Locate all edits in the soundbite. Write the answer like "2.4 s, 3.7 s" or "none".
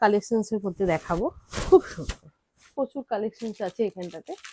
2.7 s